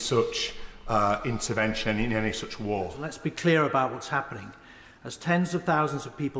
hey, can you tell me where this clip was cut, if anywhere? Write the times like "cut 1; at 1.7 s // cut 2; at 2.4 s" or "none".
cut 1; at 3.0 s